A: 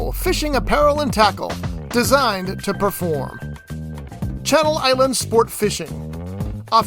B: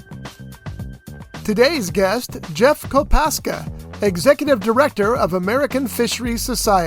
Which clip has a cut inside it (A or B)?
B